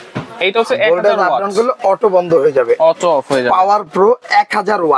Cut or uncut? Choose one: uncut